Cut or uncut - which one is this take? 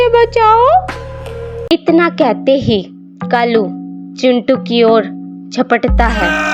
cut